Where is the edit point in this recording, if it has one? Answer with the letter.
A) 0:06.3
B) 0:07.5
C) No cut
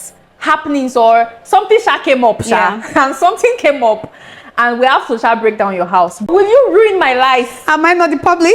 A